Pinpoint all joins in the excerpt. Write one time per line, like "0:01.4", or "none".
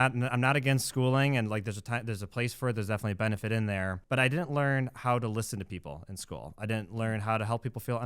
0:04.0